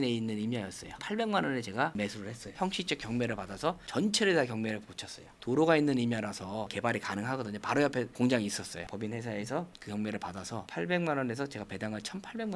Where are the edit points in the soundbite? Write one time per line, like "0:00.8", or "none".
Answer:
0:01.0
0:02.5
0:06.7

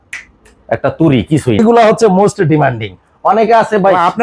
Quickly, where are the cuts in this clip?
0:01.6

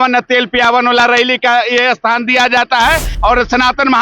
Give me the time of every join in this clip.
0:03.1

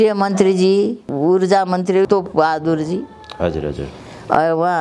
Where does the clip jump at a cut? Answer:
0:01.1
0:02.1

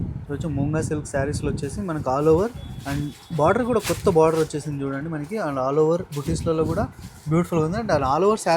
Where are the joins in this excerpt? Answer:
none

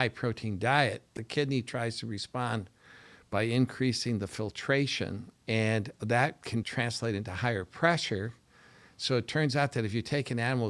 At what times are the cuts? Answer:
0:01.1
0:05.3
0:06.7

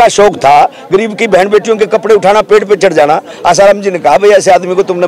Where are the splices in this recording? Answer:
none

